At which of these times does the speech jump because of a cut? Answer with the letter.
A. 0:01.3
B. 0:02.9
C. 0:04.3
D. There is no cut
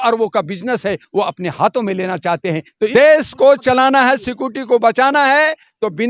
B